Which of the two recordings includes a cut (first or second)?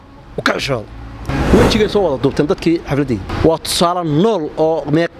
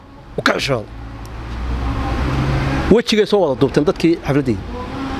first